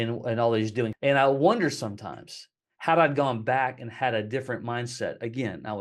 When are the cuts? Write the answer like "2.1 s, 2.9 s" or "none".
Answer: 0.9 s

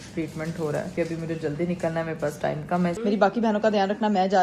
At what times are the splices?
0.9 s, 3.0 s

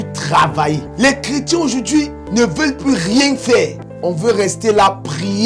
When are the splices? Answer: 0.9 s, 2.2 s, 3.9 s

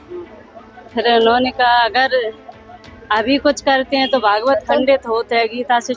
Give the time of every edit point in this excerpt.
none

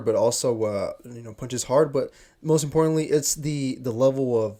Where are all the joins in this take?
none

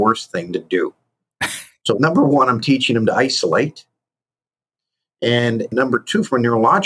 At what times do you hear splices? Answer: 2.0 s, 5.7 s

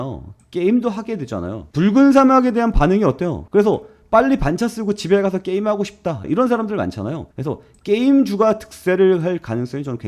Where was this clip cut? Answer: 1.6 s, 3.4 s, 6.2 s

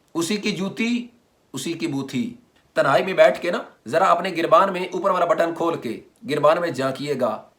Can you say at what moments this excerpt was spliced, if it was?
none

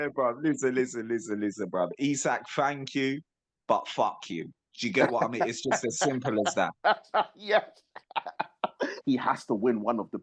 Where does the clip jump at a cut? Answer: 9.0 s

